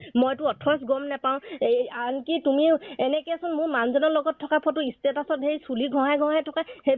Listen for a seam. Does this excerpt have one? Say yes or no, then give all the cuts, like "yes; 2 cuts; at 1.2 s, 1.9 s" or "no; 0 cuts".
yes; 1 cut; at 3.7 s